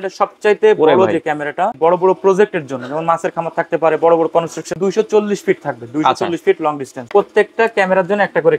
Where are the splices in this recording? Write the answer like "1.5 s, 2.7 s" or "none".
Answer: 1.7 s, 4.7 s, 7.0 s